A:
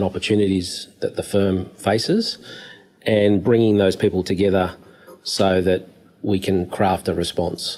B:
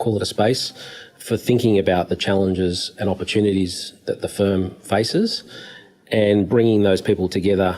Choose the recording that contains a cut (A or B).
B